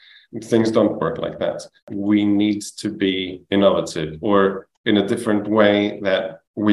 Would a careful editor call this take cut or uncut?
cut